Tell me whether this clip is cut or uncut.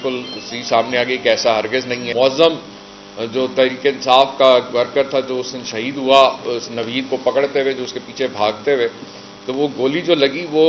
cut